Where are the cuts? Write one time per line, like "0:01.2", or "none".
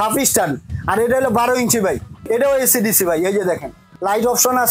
0:02.2
0:03.8

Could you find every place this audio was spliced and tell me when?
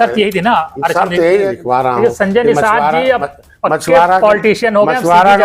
0:01.6

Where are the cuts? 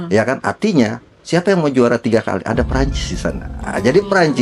none

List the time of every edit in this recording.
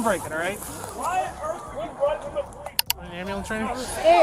0:02.9

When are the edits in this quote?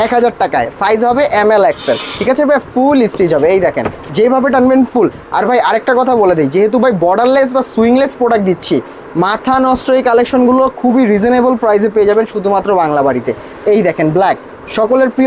none

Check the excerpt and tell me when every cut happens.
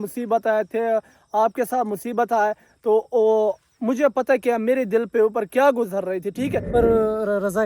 0:06.7

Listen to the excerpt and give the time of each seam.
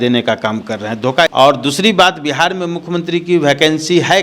0:01.3

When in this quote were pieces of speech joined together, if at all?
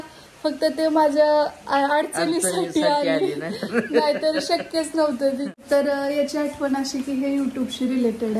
0:05.5

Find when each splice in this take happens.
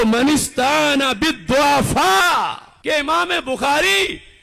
0:02.7

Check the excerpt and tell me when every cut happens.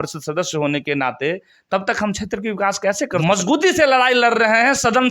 0:03.2

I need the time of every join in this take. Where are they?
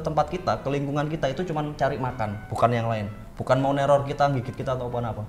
none

